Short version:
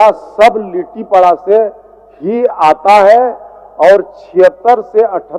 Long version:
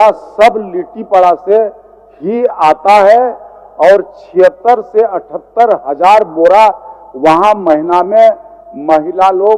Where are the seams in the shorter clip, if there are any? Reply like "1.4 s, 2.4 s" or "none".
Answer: none